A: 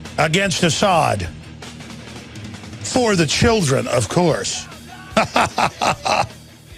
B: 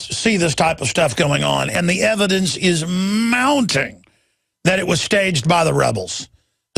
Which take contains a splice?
B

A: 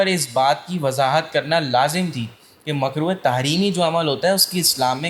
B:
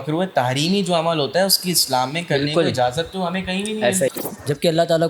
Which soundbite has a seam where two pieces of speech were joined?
B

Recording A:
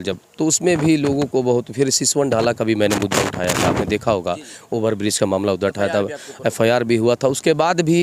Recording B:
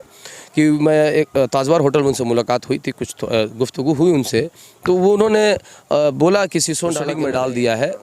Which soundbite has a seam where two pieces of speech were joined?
B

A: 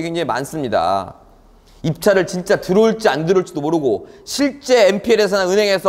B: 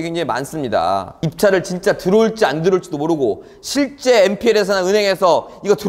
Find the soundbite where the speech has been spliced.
B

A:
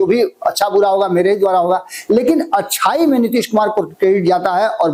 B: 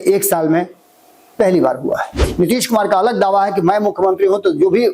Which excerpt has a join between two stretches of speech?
B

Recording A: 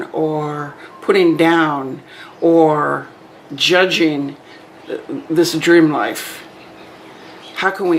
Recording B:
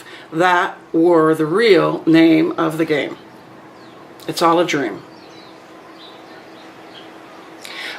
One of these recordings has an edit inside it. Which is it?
B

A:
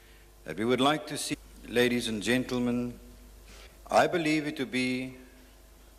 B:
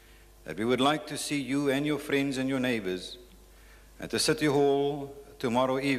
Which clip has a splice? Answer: B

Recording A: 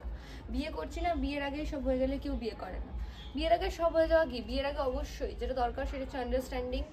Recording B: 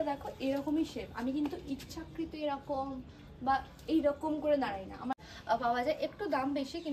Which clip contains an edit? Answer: B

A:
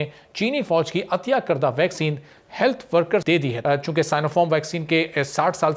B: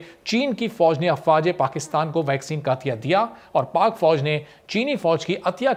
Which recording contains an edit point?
A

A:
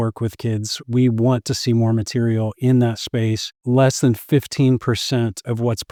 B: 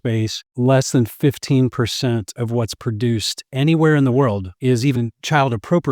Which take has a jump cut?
B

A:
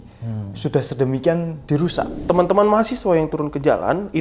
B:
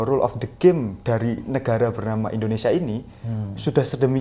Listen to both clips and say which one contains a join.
A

